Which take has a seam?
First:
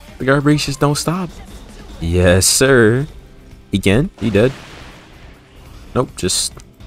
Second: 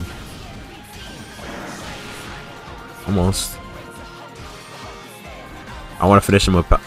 first; 2 cuts; at 1.3 s, 4.1 s

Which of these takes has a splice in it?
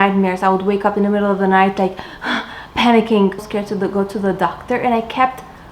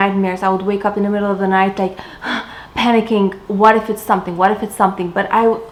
first; 1 cut; at 3.4 s

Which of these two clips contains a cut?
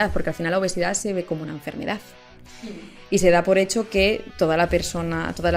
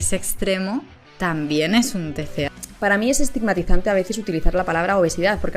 second; 1 cut; at 2.5 s

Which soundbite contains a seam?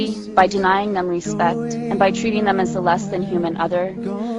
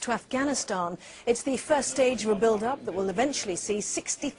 second; 1 cut; at 3.4 s

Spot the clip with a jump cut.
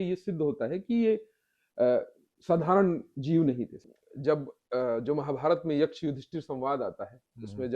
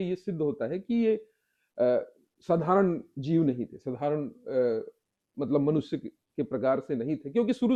first; 1 cut; at 3.8 s

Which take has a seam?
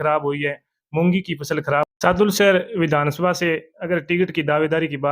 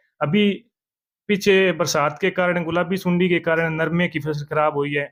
first; 1 cut; at 1.9 s

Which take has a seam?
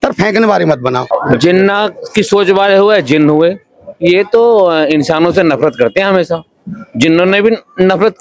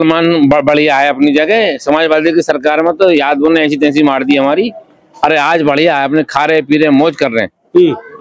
first; 1 cut; at 1.1 s

